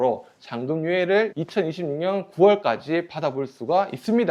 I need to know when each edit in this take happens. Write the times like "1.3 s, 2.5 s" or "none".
none